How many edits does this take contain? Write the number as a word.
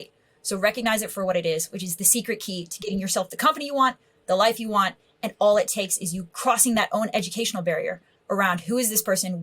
one